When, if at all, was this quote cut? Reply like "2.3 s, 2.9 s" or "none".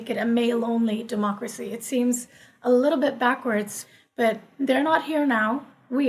3.8 s